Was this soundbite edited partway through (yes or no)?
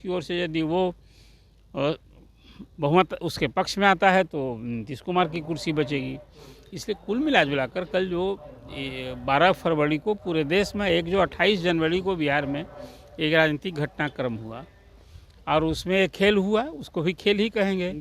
no